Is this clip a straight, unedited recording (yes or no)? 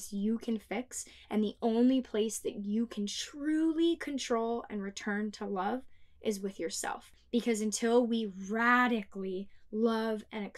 no